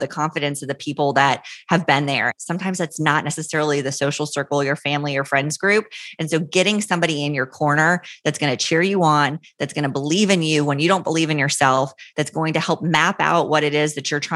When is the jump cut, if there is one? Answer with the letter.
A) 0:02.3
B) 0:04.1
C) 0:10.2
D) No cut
A